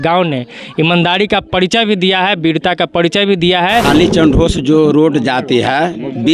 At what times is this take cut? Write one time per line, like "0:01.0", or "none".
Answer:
0:03.9